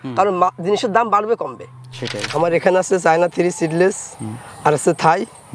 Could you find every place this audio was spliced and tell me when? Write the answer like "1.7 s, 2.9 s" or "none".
2.2 s